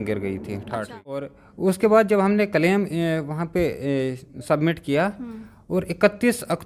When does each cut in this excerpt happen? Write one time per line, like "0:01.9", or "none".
0:01.2